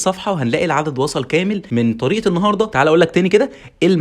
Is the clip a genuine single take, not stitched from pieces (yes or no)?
no